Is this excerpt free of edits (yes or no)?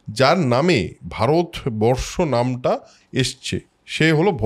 yes